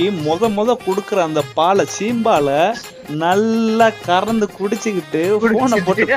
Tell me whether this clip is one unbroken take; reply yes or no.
yes